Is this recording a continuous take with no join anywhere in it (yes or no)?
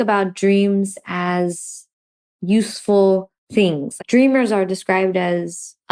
yes